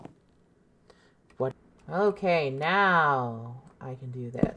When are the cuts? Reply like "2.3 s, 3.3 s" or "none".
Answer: 1.5 s